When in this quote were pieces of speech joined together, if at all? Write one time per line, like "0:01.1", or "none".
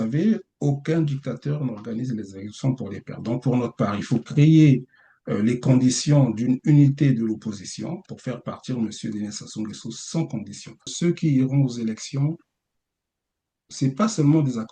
0:10.9